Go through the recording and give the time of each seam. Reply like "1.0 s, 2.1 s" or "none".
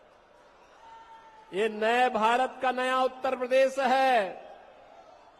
none